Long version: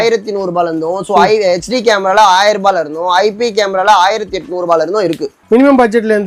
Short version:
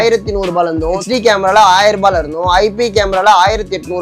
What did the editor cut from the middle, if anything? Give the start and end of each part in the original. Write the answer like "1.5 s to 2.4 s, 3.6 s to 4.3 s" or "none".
1.0 s to 1.6 s